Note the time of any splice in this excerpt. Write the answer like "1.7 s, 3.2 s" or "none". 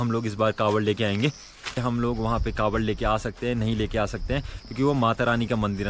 1.7 s